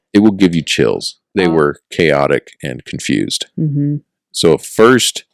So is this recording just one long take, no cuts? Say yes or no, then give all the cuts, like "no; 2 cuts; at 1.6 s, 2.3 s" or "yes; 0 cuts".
no; 1 cut; at 1.2 s